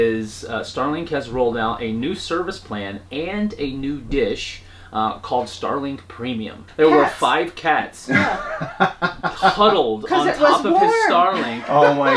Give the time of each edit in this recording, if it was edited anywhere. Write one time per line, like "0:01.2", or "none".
0:06.6